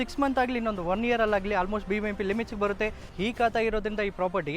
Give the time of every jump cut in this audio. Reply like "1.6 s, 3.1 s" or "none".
3.0 s

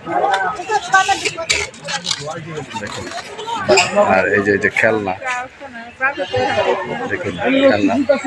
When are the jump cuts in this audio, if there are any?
3.9 s

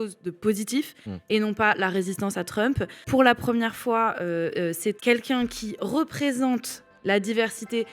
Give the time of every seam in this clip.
3.0 s, 5.0 s

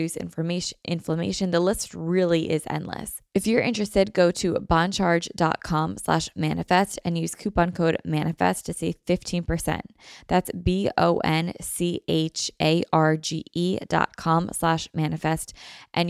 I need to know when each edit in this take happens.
3.1 s

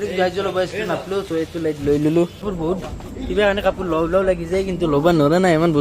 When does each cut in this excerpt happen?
2.4 s

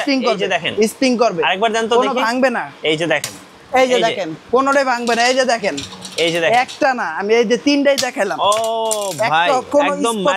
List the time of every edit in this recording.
none

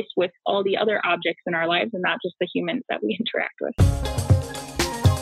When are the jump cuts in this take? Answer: 3.7 s

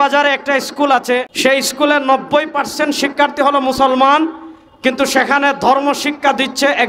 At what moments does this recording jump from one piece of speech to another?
1.3 s

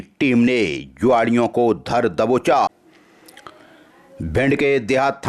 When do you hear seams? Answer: 2.7 s

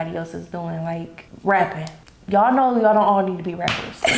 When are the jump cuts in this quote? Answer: none

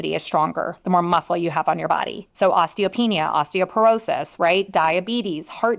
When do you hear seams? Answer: none

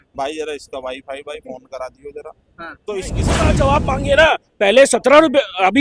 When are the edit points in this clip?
3.4 s

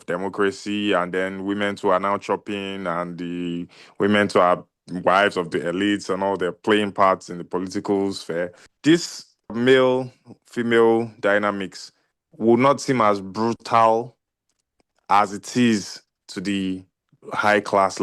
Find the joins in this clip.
8.6 s, 9.6 s

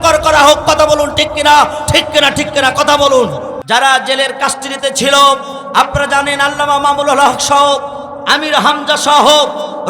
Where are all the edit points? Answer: 3.6 s

